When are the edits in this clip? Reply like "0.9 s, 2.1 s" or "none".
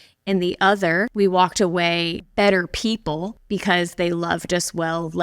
1.1 s, 2.2 s, 3.3 s